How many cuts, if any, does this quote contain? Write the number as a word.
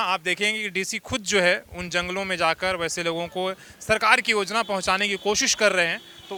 zero